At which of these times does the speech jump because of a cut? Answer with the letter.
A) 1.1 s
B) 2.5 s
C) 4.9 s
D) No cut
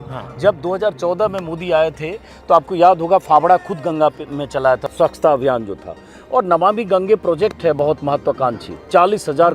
C